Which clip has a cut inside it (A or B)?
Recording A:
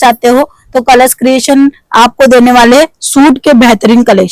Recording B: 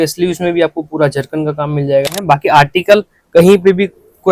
B